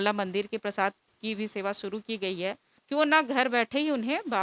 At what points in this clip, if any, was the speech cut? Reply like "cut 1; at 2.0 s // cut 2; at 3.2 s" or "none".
cut 1; at 2.8 s